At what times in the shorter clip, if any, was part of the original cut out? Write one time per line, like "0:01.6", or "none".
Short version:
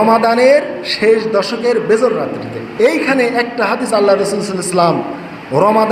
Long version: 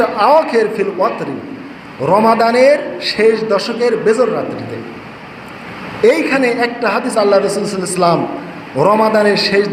0:02.6